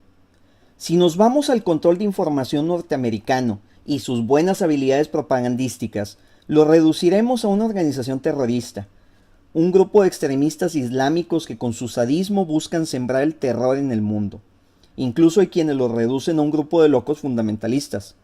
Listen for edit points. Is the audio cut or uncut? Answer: cut